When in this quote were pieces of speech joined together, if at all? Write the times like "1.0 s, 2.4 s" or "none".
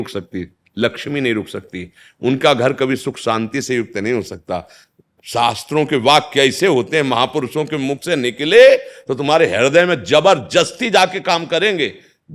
4.8 s